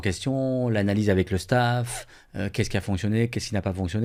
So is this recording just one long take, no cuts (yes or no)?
yes